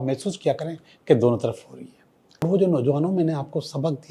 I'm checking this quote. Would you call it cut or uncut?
cut